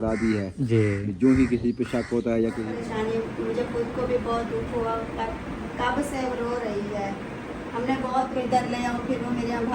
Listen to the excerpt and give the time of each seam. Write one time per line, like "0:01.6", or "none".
0:02.7
0:08.3